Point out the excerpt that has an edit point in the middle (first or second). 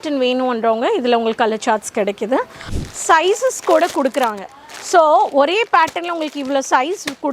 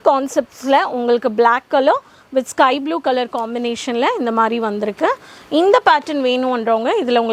first